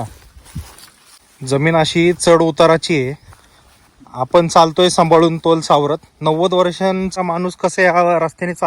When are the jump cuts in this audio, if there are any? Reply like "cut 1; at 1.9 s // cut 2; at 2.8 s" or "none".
cut 1; at 1.3 s // cut 2; at 7.2 s